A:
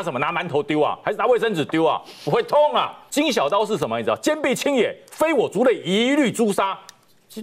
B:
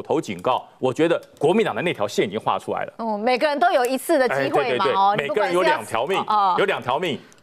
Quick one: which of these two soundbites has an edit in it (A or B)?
A